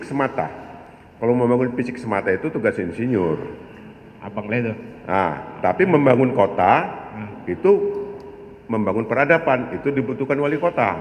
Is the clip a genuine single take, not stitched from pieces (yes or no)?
yes